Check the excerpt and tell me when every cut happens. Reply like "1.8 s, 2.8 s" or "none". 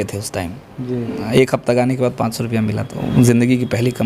2.9 s